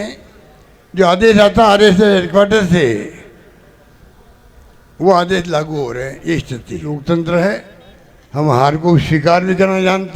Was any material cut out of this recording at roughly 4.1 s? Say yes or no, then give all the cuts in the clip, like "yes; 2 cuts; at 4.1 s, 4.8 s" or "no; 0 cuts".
no; 1 cut; at 6.9 s